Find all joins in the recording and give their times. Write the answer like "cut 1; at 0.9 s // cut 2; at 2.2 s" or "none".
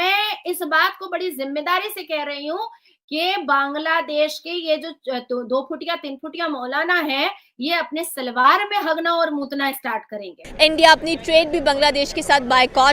cut 1; at 10.5 s